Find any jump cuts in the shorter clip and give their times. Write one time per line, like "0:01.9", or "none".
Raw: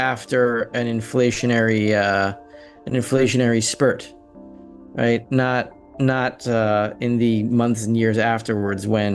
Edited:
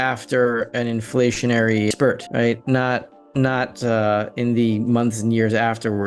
0:01.9